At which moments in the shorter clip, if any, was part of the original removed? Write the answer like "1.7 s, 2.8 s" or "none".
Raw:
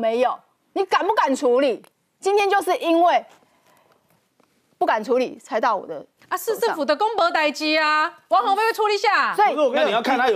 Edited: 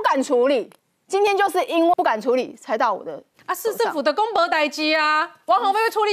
1.9 s